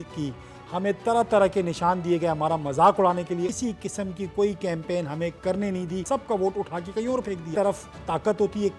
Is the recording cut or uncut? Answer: cut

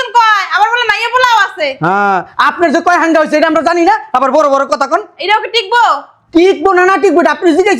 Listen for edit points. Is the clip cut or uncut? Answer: uncut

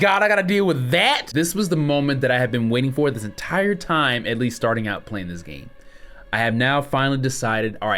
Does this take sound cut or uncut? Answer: cut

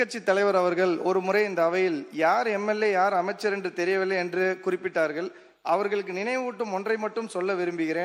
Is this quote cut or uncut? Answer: uncut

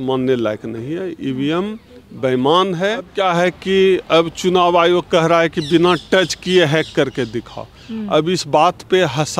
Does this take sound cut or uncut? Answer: cut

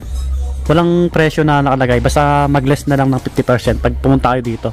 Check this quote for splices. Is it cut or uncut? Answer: uncut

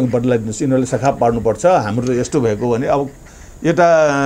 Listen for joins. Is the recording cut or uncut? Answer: uncut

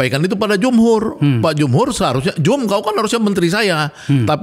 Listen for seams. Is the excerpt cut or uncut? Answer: uncut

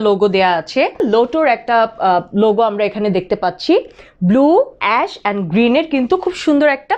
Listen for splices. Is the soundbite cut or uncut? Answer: cut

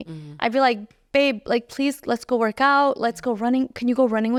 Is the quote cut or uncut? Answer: uncut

